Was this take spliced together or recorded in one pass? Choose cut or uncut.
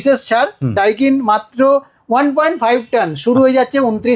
uncut